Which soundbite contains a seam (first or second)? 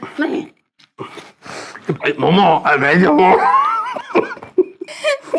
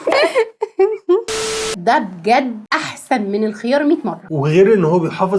second